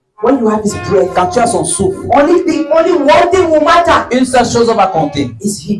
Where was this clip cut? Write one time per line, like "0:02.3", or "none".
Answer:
none